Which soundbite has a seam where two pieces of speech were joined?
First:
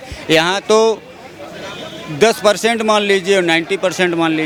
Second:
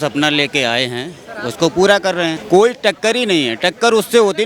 second; 1 cut; at 2.4 s

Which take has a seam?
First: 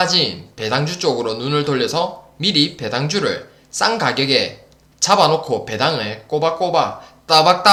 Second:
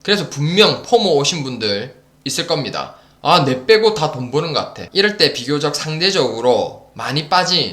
second; 1 cut; at 4.8 s

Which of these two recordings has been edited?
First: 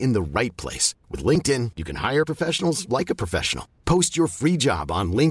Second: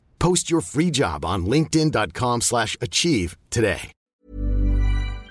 second; 1 cut; at 3.9 s

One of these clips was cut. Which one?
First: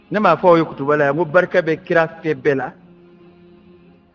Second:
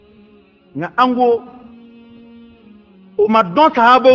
first; 1 cut; at 2.8 s

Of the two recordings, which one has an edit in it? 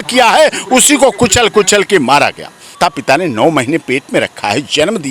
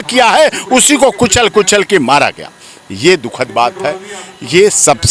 first; 1 cut; at 2.8 s

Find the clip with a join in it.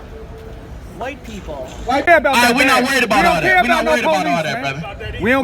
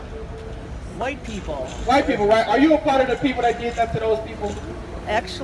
first; 1 cut; at 2.1 s

